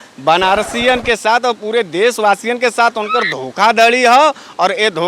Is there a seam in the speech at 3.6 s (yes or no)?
no